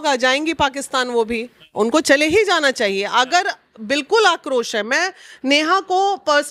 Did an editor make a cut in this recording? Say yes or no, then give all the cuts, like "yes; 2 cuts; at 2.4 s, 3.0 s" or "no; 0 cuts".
no; 0 cuts